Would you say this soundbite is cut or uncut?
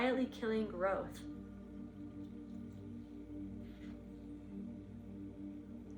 cut